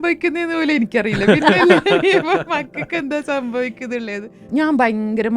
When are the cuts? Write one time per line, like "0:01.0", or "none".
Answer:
0:04.4